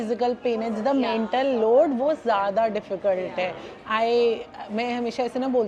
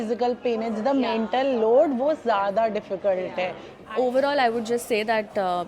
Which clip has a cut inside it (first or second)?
second